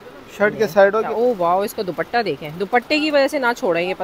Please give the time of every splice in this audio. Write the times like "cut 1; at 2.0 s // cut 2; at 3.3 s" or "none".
cut 1; at 1.1 s